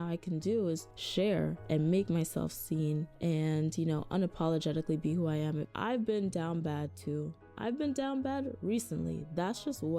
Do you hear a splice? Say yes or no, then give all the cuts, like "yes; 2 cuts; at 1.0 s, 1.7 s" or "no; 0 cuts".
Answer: yes; 1 cut; at 5.6 s